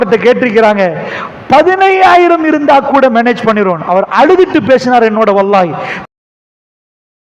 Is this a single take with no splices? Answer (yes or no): yes